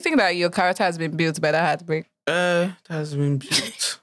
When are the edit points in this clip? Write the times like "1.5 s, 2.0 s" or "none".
2.1 s